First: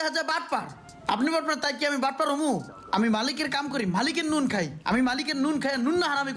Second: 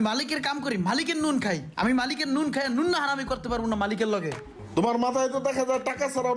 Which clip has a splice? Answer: second; 1 cut; at 4.5 s

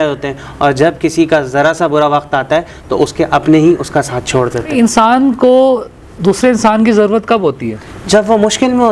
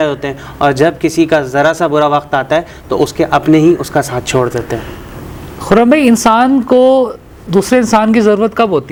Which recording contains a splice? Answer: first; 1 cut; at 4.7 s

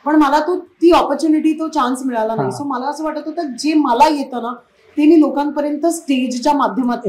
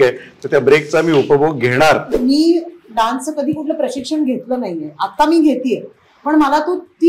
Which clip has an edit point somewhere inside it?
second; 1 cut; at 2.1 s

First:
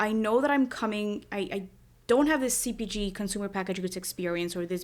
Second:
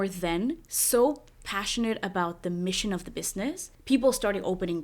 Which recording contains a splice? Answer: second; 1 cut; at 3.7 s

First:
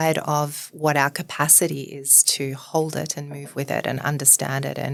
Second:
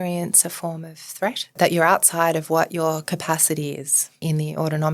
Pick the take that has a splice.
second; 2 cuts; at 1.6 s, 4.2 s

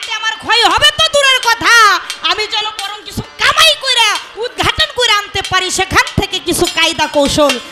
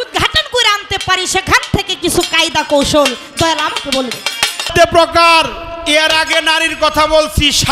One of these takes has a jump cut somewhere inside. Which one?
second; 1 cut; at 4.7 s

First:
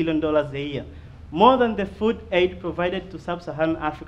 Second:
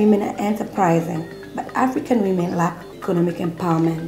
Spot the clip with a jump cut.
second; 1 cut; at 2.9 s

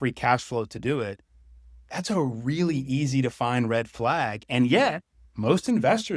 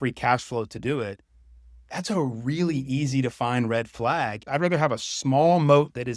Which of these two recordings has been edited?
second; 1 cut; at 4.4 s

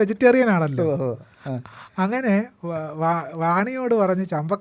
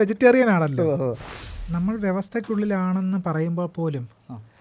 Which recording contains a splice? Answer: second; 1 cut; at 1.3 s

